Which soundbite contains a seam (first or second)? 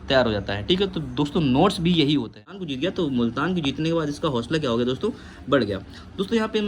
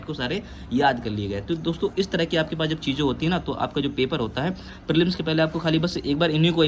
first